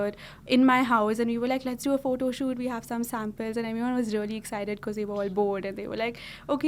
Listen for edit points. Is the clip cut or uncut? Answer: uncut